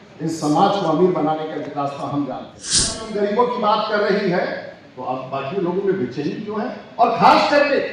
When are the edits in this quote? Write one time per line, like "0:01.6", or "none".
0:03.0